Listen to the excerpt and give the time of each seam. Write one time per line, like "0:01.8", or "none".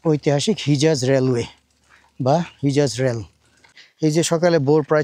0:03.8